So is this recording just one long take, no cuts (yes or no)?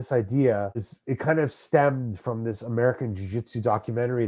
no